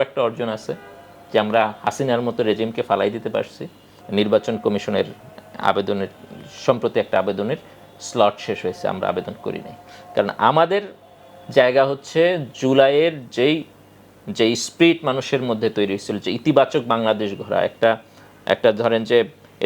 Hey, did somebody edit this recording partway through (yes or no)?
no